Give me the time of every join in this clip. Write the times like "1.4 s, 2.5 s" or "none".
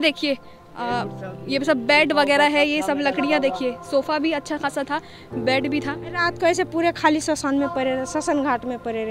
6.0 s